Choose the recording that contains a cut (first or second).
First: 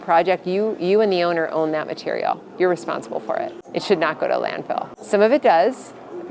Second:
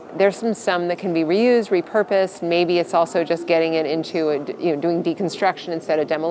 first